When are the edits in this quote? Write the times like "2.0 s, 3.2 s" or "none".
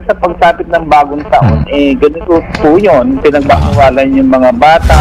none

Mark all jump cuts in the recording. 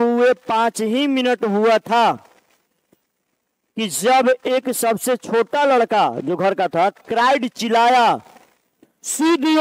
none

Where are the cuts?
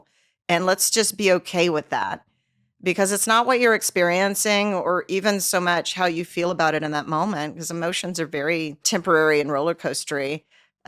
8.8 s

